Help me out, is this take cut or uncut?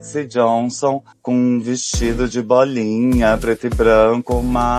uncut